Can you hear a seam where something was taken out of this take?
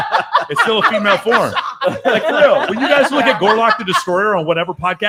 no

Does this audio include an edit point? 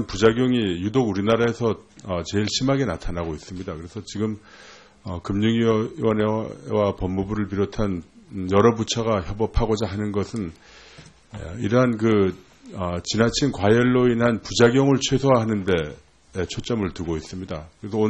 yes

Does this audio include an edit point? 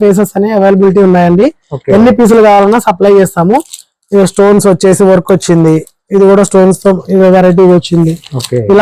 no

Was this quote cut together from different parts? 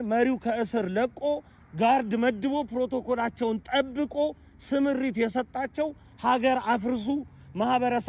no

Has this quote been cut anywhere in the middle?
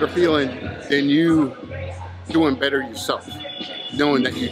no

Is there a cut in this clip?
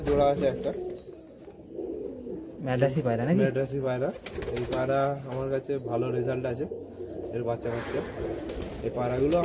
no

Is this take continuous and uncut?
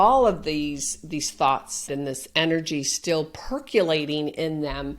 no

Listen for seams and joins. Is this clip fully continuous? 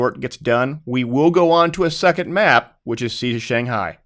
no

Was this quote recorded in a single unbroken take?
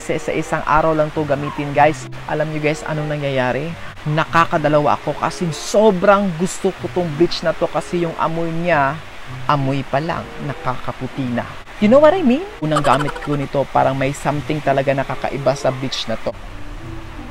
no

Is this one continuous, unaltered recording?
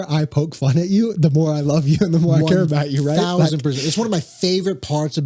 yes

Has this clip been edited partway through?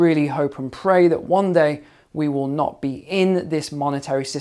no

